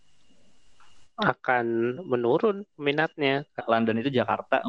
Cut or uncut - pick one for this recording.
cut